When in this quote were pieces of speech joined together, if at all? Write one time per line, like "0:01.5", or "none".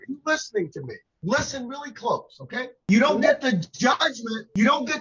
0:02.9